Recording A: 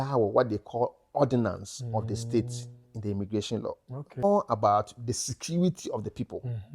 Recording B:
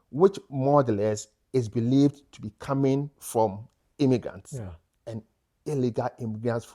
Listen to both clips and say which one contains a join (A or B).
A